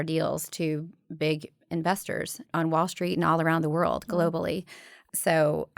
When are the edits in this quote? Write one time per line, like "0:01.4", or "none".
0:02.4